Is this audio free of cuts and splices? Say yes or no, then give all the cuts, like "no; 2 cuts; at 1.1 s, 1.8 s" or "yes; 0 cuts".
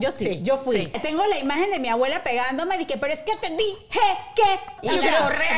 no; 2 cuts; at 1.0 s, 4.7 s